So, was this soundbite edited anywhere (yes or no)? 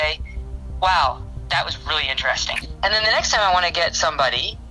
yes